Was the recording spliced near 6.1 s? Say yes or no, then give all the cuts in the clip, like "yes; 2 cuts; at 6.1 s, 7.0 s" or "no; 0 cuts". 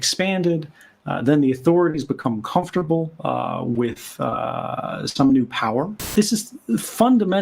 yes; 1 cut; at 6.1 s